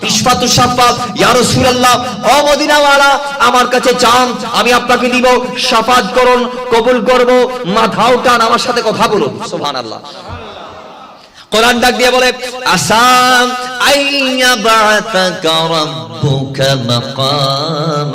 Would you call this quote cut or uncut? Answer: uncut